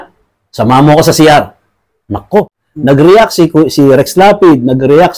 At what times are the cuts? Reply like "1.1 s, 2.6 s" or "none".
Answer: 2.6 s